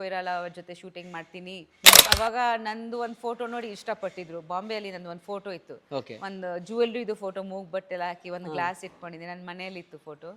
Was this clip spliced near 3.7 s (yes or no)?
no